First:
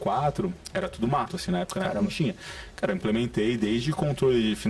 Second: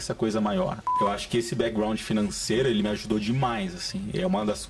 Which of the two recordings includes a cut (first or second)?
second